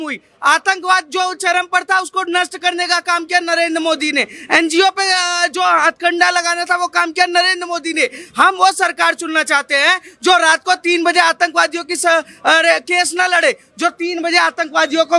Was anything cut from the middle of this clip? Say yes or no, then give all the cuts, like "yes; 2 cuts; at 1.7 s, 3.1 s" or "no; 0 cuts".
no; 0 cuts